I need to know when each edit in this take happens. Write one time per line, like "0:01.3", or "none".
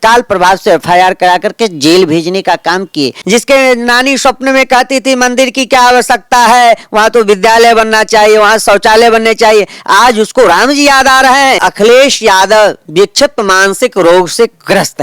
0:03.2
0:11.6